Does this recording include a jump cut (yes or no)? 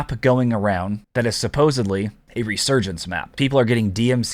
yes